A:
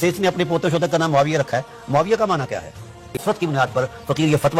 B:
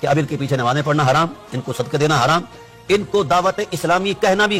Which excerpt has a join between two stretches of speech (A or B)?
A